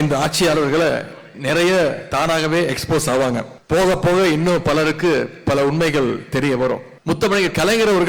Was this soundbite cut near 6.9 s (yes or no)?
yes